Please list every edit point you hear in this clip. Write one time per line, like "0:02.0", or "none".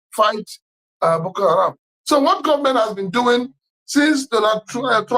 0:01.9